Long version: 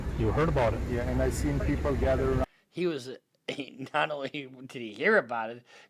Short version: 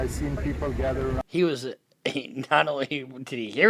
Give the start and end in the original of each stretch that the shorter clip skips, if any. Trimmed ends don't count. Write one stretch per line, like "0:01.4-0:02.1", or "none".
0:02.5-0:02.7